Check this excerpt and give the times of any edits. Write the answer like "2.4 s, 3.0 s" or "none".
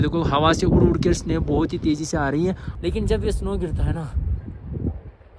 2.7 s